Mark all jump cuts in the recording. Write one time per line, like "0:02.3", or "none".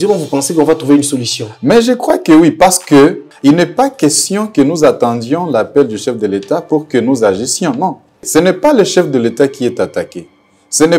0:03.3
0:08.2